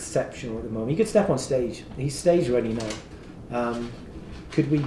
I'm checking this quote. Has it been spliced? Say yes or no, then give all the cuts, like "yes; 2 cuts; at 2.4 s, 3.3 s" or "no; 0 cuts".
no; 0 cuts